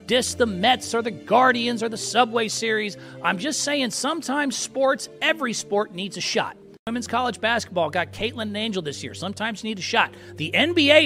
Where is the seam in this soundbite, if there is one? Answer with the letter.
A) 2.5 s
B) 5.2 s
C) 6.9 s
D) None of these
C